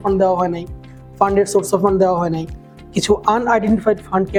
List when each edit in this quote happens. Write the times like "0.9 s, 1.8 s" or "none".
none